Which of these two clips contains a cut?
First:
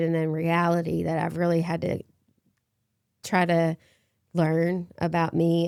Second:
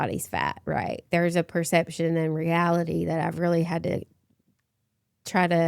second; 1 cut; at 1.1 s

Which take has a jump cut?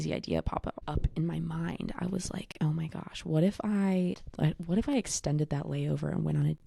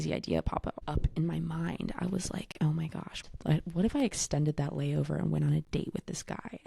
second; 1 cut; at 3.2 s

